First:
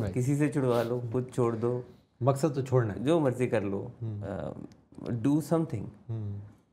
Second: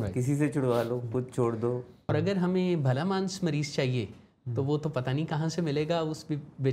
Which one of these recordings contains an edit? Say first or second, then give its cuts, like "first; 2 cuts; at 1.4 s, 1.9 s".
second; 1 cut; at 2.1 s